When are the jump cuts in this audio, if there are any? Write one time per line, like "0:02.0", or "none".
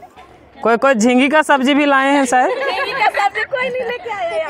0:02.3